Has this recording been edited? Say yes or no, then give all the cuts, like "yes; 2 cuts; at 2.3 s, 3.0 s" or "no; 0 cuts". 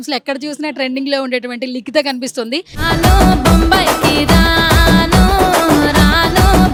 no; 0 cuts